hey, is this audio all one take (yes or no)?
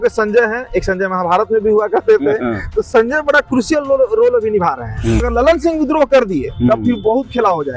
no